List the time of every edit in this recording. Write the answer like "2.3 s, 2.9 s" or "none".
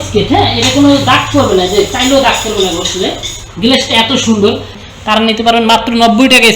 4.8 s